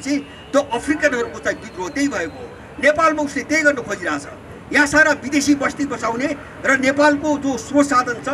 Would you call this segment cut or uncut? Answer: uncut